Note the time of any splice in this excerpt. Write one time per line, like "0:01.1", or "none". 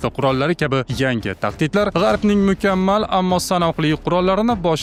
none